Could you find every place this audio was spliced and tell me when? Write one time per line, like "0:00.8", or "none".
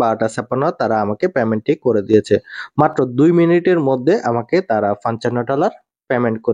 none